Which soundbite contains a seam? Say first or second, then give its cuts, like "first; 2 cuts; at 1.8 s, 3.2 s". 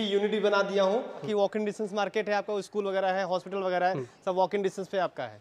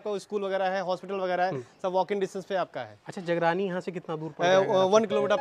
first; 1 cut; at 1.2 s